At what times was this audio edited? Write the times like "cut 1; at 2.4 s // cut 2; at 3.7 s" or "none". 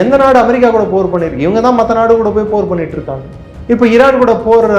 none